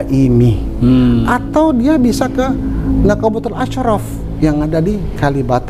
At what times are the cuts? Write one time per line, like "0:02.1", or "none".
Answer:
none